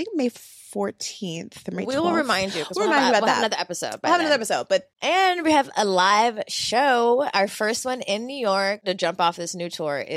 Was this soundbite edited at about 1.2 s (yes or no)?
no